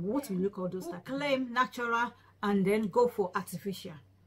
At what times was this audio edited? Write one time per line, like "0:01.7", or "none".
0:00.9